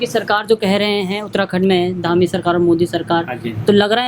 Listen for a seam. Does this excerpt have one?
no; 0 cuts

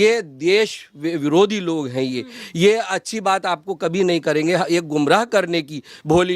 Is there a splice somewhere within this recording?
no; 0 cuts

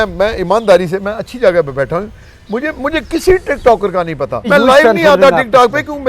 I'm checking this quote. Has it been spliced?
yes; 1 cut; at 4.5 s

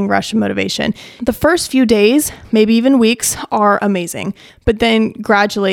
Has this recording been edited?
yes; 2 cuts; at 1.1 s, 4.5 s

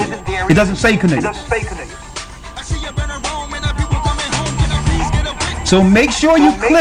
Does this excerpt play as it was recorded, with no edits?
yes; 0 cuts

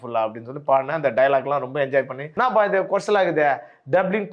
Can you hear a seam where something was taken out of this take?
yes; 1 cut; at 2.2 s

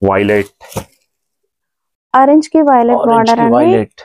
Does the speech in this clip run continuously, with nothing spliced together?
yes; 0 cuts

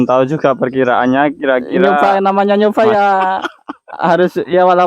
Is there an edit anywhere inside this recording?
yes; 1 cut; at 2.2 s

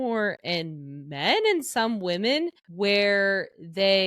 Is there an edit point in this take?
yes; 1 cut; at 2.6 s

